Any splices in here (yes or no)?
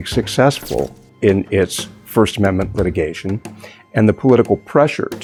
no